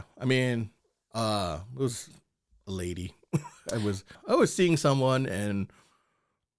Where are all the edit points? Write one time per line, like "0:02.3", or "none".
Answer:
0:04.1